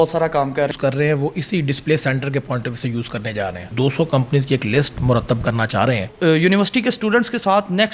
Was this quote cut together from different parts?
yes; 3 cuts; at 0.7 s, 3.7 s, 6.1 s

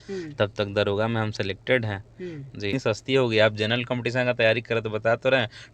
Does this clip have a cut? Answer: yes; 1 cut; at 2.7 s

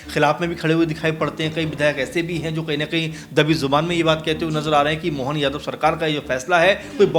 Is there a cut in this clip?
no; 0 cuts

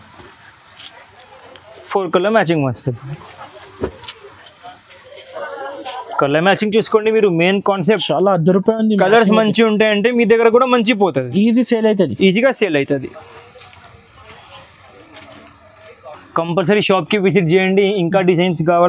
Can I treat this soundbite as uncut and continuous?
yes; 0 cuts

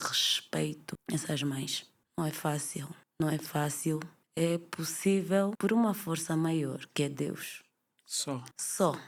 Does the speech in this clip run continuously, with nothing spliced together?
yes; 0 cuts

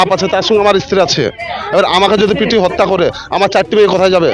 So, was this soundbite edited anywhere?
no; 0 cuts

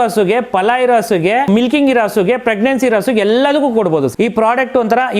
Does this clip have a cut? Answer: yes; 2 cuts; at 1.5 s, 4.1 s

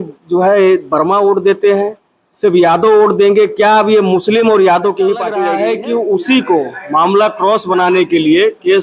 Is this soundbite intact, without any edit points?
no; 1 cut; at 5.4 s

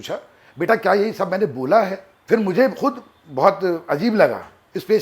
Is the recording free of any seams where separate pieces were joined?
no; 1 cut; at 2.1 s

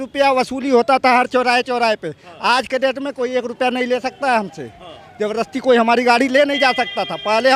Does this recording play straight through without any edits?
yes; 0 cuts

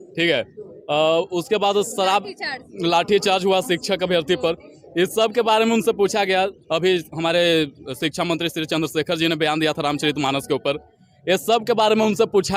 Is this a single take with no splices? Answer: yes; 0 cuts

